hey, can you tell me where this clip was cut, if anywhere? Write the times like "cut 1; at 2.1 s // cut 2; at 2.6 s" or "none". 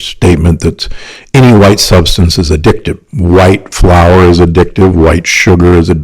cut 1; at 3.1 s